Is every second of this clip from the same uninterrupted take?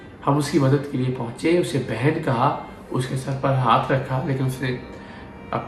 yes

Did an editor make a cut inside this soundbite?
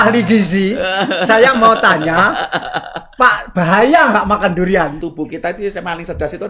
yes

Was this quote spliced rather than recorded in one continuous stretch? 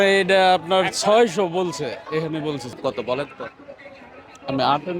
yes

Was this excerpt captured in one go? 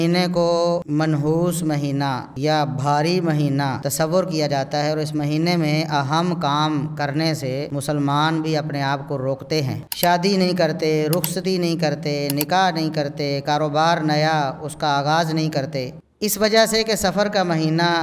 no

